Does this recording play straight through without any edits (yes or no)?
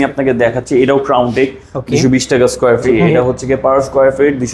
no